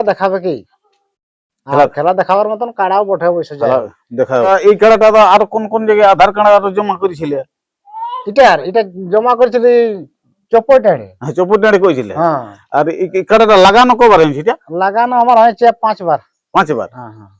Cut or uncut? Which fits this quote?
uncut